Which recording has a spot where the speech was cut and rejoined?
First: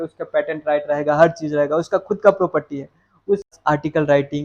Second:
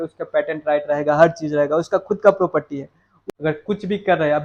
first; 1 cut; at 3.5 s

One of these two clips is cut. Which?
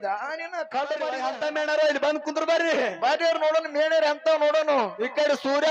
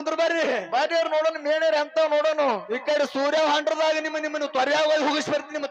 first; 1 cut; at 1.2 s

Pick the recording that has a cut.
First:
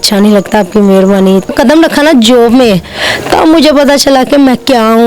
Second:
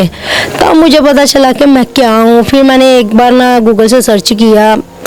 first; 1 cut; at 1.5 s

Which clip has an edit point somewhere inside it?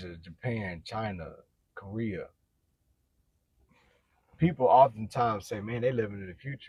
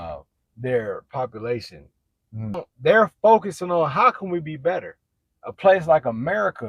second; 1 cut; at 2.7 s

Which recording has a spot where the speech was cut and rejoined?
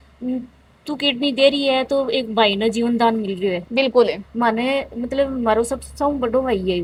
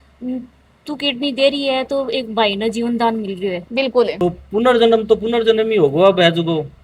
second; 1 cut; at 4.1 s

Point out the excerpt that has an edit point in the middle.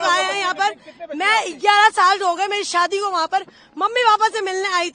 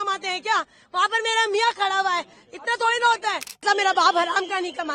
second; 1 cut; at 3.6 s

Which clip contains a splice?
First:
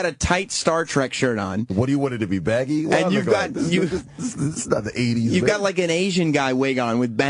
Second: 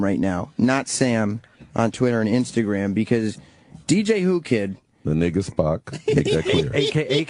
second; 1 cut; at 4.5 s

